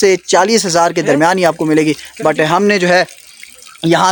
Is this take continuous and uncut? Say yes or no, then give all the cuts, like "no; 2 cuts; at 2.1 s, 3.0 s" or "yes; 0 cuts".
yes; 0 cuts